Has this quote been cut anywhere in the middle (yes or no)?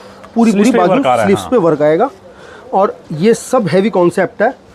no